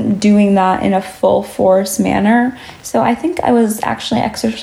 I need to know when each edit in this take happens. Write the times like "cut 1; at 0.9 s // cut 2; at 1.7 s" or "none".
none